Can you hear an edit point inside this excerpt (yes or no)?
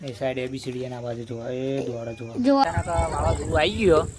yes